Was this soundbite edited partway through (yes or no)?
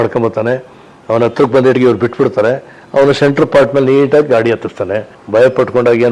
yes